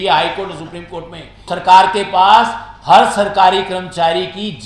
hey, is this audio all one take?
no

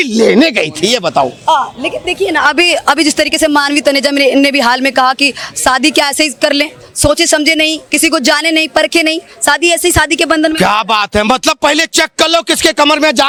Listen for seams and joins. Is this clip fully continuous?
yes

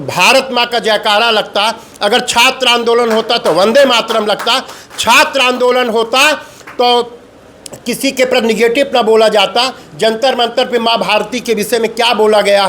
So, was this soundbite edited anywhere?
no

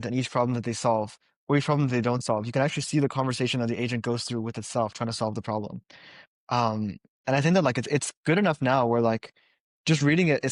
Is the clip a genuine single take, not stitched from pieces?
yes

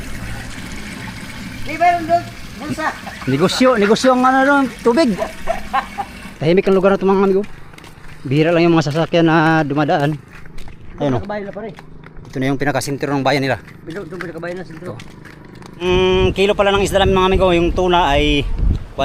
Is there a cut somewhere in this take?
yes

